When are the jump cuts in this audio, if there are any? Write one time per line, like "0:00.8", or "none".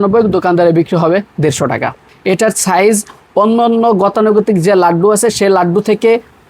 0:02.1